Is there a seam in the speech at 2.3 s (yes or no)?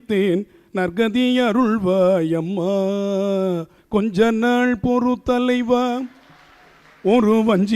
no